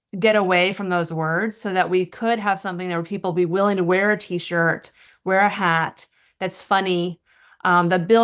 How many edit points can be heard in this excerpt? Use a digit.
0